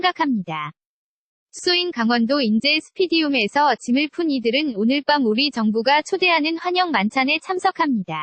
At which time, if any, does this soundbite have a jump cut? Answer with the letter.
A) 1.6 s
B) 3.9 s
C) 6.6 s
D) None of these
A